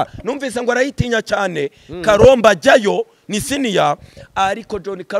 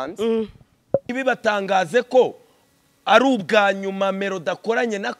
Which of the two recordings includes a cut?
second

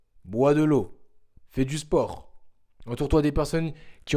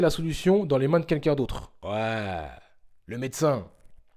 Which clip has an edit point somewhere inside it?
second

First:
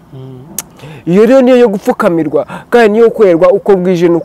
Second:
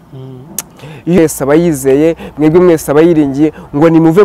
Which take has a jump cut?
second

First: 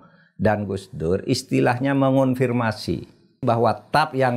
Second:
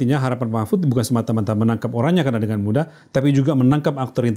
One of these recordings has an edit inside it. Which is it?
first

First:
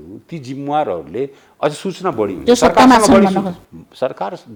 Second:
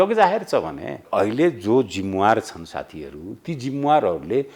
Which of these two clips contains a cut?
second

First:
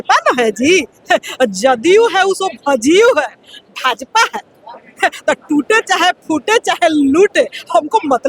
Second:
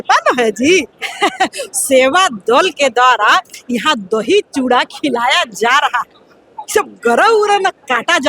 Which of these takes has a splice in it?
second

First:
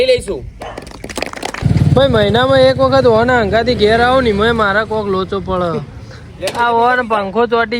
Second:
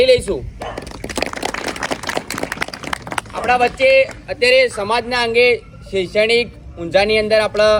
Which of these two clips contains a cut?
first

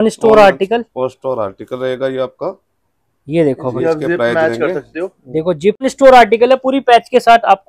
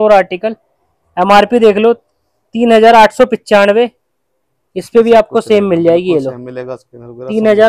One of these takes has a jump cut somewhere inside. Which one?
first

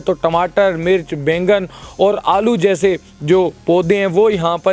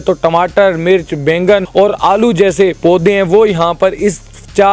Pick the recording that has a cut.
second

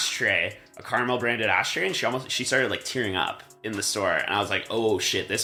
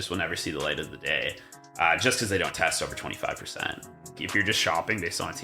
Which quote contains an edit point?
second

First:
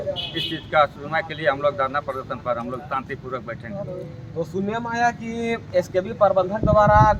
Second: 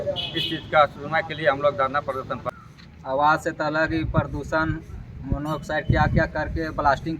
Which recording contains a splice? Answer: second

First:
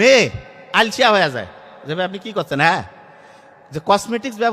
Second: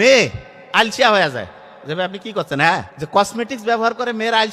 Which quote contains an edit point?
second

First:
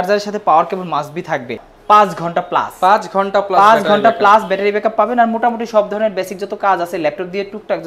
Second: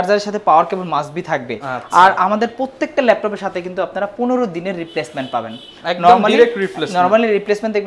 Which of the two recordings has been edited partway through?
first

